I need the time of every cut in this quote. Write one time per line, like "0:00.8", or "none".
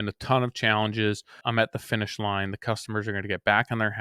0:01.4